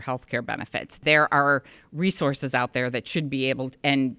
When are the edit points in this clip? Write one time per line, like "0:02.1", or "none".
0:01.0